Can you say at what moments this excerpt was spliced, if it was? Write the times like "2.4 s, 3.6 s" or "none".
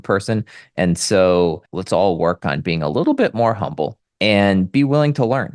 1.7 s, 4.0 s